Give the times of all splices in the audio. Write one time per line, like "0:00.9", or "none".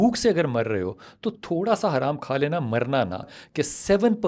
0:03.3